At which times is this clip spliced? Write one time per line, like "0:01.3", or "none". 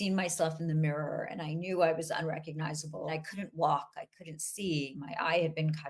0:03.1
0:05.0